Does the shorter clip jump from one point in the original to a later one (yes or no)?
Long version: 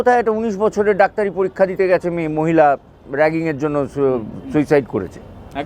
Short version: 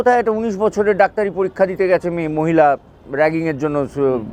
no